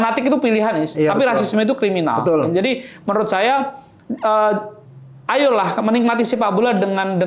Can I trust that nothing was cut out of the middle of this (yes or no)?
yes